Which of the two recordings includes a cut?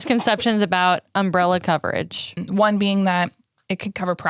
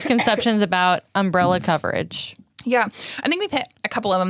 first; 1 cut; at 2.4 s

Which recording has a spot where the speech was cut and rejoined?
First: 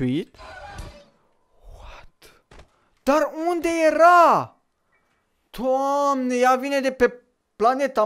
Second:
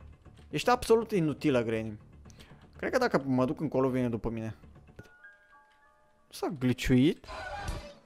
second; 1 cut; at 5.2 s

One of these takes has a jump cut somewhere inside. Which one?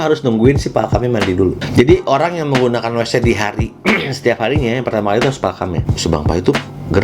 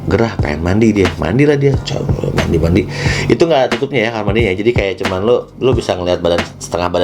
first; 2 cuts; at 1.6 s, 5.9 s

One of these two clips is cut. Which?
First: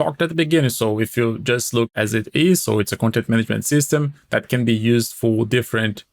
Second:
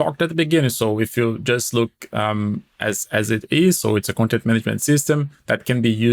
first; 1 cut; at 1.9 s

